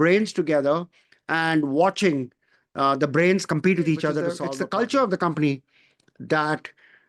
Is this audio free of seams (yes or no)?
no